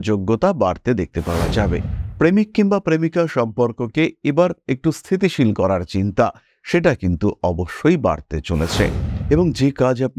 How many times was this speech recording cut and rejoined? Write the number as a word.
two